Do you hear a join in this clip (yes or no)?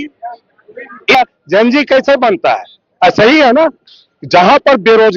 yes